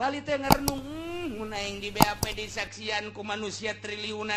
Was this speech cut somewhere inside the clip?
no; 0 cuts

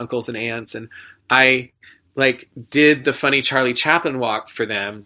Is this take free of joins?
yes; 0 cuts

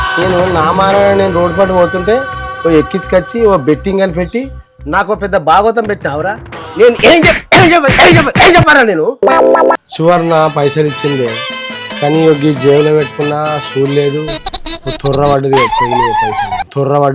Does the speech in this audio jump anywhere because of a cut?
yes; 1 cut; at 9.8 s

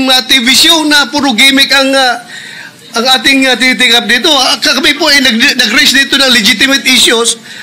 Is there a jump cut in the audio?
no; 0 cuts

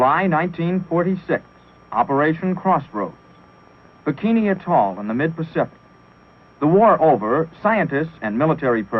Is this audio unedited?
no; 1 cut; at 3.2 s

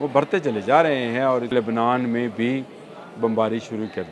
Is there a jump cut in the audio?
yes; 1 cut; at 1.5 s

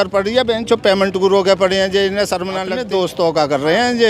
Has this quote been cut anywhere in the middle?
yes; 1 cut; at 2.7 s

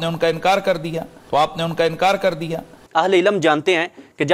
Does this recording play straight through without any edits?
yes; 0 cuts

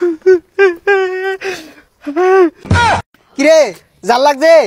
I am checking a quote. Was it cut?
yes; 1 cut; at 3.2 s

